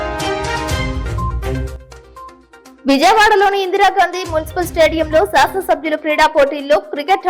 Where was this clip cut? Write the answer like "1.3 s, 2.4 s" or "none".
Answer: 1.7 s